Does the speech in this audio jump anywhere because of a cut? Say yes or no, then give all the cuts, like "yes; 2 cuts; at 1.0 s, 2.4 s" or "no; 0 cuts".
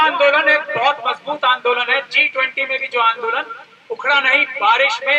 no; 0 cuts